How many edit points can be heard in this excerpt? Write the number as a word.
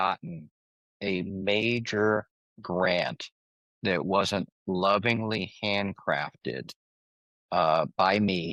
zero